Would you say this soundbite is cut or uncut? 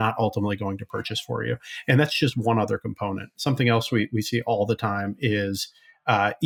uncut